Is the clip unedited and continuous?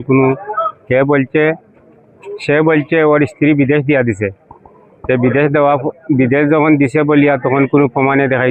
yes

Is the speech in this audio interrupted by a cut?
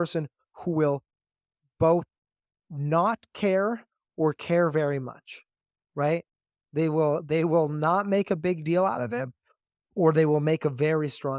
no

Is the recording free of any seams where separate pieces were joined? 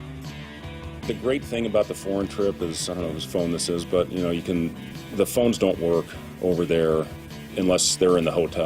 no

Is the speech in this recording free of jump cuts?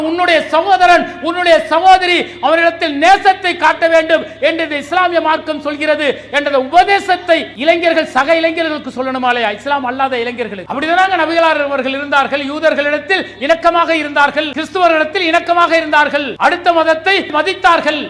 no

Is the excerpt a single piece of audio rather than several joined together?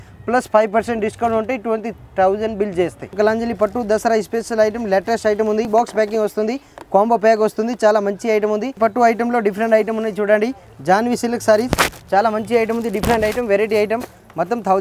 no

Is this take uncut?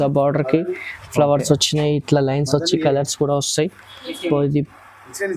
yes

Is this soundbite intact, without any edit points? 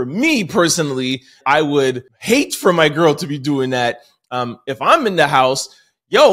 no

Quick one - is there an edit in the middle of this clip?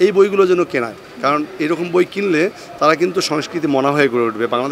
no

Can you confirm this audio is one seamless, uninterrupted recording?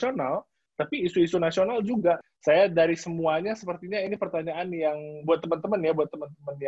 no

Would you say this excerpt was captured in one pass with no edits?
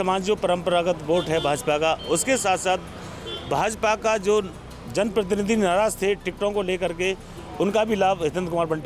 yes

